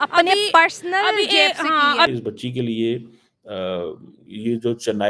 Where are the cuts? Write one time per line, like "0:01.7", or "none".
0:02.1